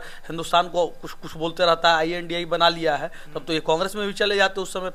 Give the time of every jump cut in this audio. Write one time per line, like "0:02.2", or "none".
none